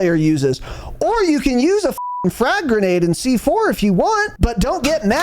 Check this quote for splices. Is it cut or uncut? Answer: cut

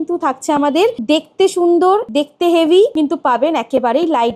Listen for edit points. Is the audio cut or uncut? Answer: cut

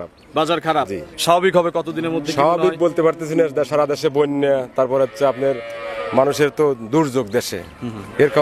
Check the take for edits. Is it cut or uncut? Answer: uncut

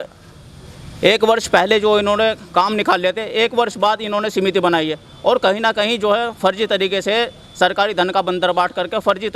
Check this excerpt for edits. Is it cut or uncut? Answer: uncut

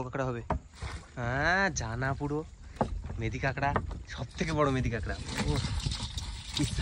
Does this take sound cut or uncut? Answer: uncut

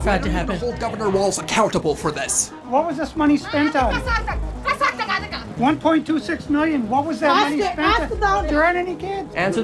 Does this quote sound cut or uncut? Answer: cut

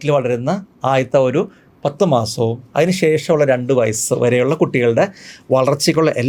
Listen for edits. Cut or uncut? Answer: uncut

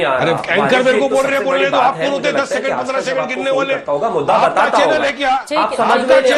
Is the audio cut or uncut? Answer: uncut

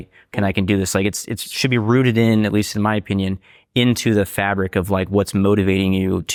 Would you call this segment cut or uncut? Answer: uncut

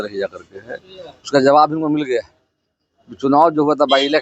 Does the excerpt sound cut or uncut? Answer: uncut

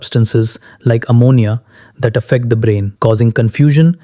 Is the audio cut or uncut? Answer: cut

